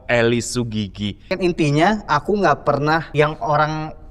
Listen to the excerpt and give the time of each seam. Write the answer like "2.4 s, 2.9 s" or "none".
1.3 s, 3.1 s